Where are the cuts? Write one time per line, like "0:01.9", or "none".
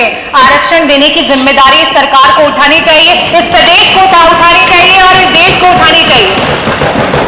none